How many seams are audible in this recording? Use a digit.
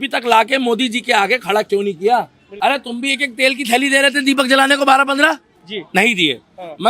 1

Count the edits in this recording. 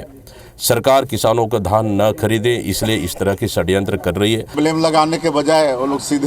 1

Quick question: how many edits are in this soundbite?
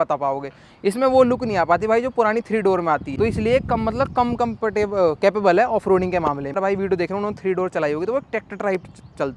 2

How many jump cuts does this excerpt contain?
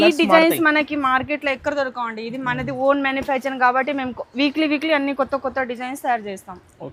0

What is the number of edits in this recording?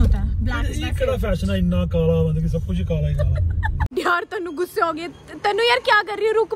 1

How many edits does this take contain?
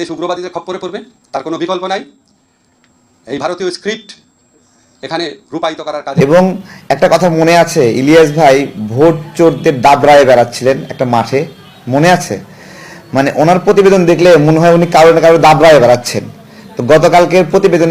1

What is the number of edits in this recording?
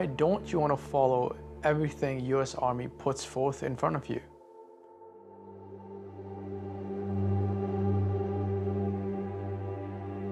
0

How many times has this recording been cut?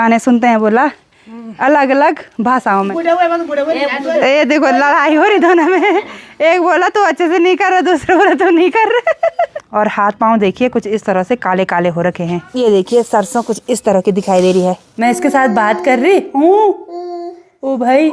4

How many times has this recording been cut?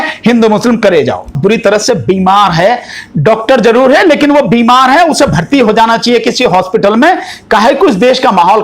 1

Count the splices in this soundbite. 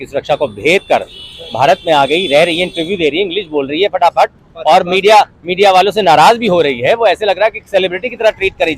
0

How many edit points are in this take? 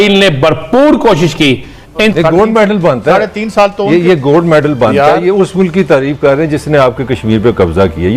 1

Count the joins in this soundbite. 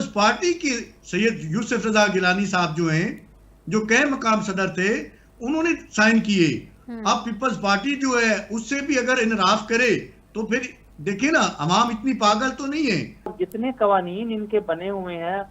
1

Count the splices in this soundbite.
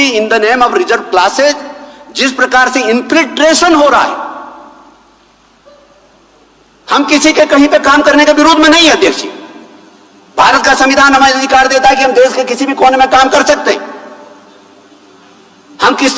0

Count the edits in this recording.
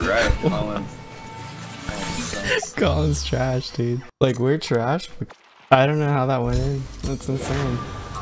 2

